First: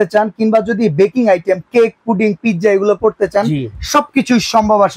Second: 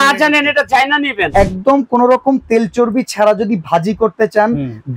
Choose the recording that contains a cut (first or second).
second